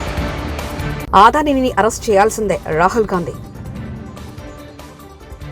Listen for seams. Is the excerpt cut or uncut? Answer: cut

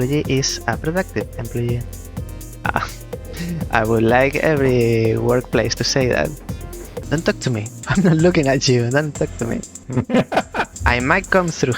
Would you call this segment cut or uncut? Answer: cut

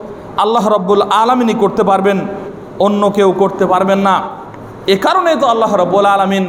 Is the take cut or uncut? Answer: uncut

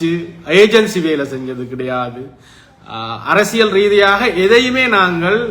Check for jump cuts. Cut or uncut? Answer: uncut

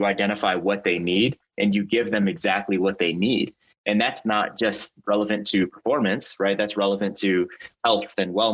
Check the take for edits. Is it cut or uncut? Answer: uncut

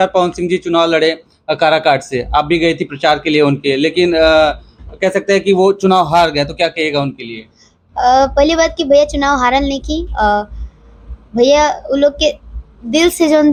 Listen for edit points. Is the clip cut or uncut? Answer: uncut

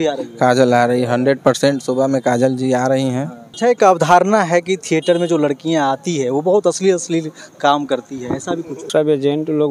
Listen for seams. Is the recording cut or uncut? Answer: cut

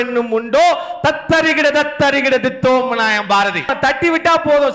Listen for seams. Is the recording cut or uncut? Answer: cut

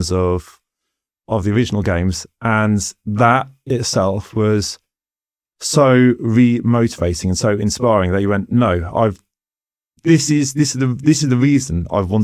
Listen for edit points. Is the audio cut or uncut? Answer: uncut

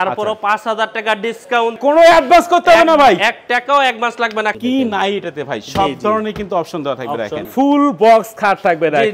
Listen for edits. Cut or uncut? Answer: cut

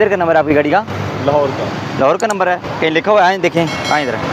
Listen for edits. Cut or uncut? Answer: uncut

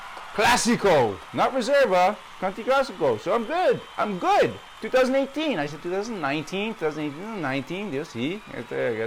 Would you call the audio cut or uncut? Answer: uncut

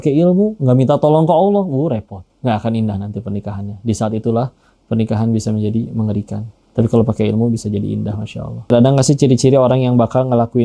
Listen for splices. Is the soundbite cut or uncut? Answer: cut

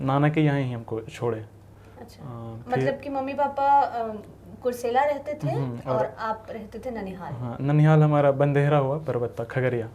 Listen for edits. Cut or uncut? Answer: uncut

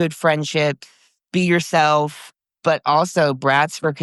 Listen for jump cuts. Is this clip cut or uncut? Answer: cut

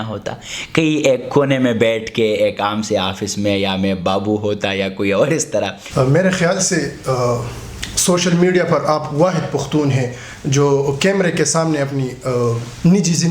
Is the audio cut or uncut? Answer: cut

